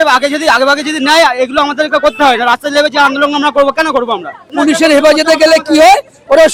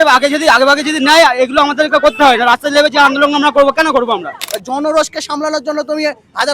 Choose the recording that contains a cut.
second; 1 cut; at 4.4 s

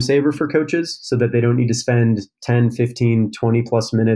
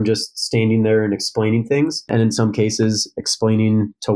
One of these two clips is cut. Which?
second; 1 cut; at 2.1 s

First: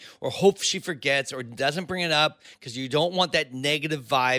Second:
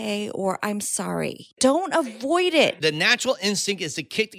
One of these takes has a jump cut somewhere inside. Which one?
second; 2 cuts; at 1.5 s, 2.8 s

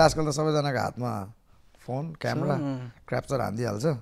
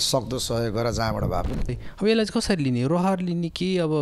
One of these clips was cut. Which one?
second; 1 cut; at 1.8 s

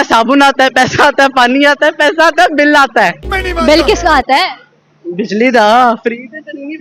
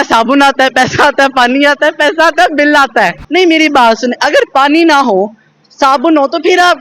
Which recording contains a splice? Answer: second; 1 cut; at 3.2 s

